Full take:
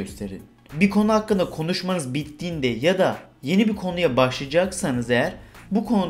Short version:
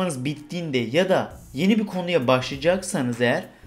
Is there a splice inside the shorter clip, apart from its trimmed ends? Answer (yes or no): no